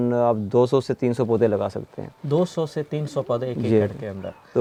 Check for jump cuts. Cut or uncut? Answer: uncut